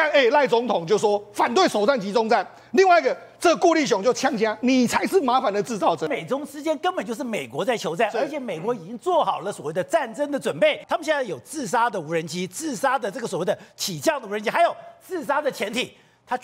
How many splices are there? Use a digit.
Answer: 2